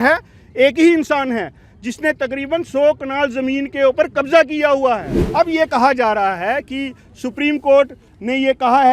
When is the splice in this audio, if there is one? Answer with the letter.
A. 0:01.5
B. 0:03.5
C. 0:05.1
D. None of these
C